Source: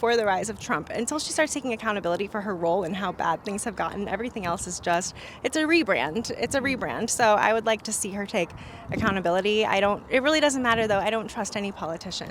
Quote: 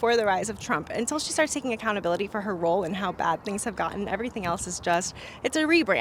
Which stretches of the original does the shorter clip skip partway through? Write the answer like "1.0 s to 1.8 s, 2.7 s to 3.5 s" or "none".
none